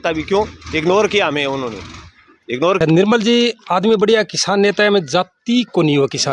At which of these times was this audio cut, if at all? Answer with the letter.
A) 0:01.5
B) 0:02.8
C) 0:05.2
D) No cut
B